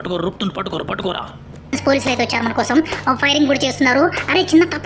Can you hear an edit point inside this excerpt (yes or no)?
yes